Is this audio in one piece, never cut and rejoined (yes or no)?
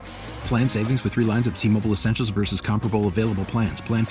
yes